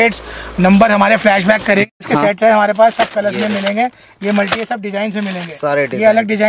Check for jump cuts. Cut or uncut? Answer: cut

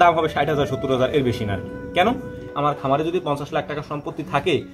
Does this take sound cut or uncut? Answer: cut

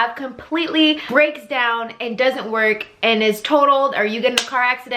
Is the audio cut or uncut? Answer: cut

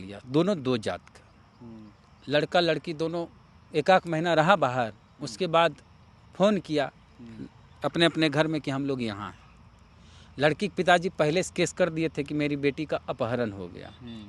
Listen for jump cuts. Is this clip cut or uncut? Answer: uncut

